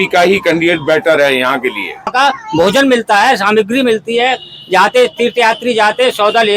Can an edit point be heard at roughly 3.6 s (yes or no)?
no